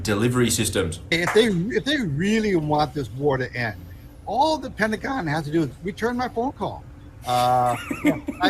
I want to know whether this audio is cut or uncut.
cut